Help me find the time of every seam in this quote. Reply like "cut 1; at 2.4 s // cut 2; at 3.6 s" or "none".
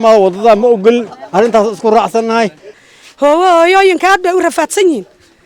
cut 1; at 2.6 s